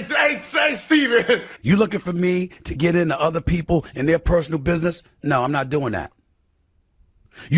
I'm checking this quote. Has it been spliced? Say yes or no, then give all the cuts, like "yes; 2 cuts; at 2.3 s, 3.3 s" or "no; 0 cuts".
yes; 1 cut; at 1.5 s